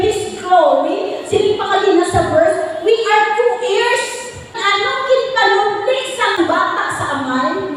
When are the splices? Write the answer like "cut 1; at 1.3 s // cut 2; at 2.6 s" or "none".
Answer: cut 1; at 4.5 s // cut 2; at 6.4 s